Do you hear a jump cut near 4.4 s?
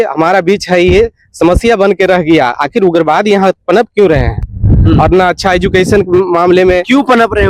no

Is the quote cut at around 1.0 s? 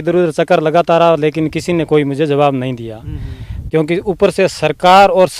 no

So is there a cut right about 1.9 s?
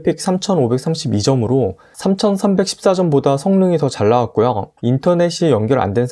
no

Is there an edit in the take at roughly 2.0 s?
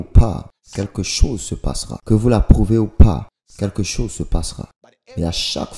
yes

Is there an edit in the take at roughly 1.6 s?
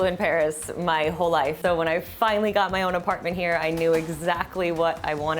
yes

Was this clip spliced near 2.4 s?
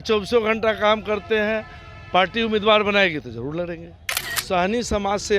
no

